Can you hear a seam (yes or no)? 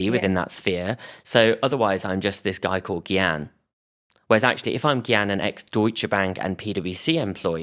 no